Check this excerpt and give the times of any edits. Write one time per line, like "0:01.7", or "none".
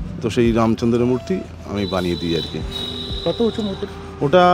none